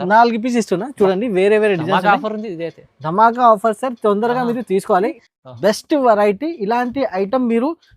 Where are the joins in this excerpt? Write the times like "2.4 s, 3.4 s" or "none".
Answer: 5.2 s